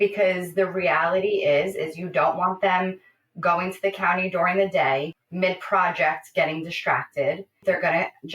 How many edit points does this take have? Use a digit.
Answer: 2